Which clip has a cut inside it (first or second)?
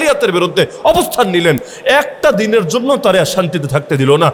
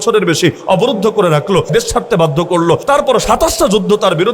second